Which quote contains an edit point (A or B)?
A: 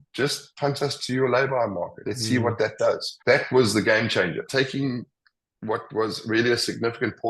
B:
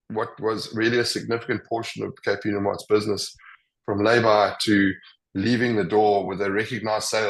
A